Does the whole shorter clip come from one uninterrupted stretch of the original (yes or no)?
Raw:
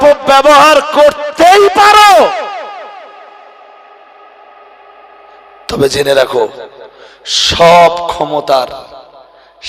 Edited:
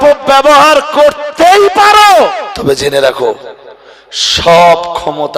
no